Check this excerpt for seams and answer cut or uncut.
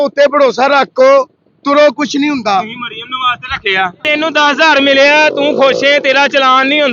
cut